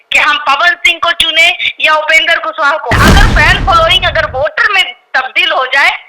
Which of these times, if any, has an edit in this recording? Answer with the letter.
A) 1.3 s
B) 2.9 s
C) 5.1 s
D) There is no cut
B